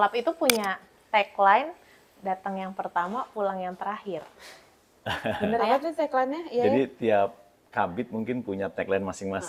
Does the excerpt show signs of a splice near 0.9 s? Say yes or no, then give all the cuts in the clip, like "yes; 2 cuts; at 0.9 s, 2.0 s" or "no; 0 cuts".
no; 0 cuts